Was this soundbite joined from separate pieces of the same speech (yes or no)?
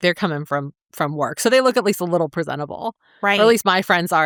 no